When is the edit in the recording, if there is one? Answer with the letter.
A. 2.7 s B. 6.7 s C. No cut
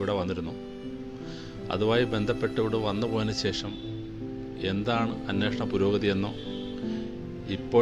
C